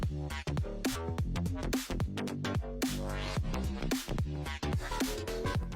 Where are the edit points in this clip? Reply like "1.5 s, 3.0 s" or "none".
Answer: 1.0 s